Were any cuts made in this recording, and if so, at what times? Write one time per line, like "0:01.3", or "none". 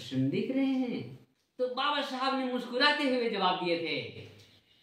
0:00.9